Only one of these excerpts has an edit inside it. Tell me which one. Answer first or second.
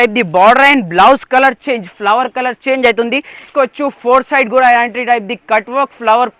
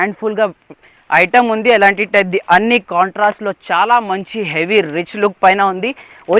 first